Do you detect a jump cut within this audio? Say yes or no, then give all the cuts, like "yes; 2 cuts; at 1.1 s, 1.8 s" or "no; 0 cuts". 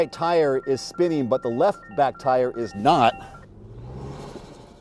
yes; 1 cut; at 3.4 s